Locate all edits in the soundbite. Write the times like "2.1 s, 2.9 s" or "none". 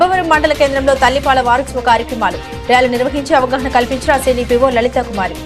none